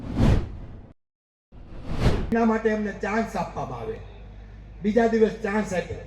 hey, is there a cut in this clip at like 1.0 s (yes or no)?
no